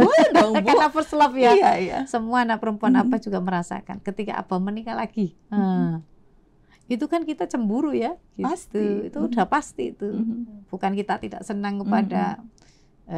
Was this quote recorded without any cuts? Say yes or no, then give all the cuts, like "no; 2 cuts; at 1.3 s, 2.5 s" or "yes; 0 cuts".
yes; 0 cuts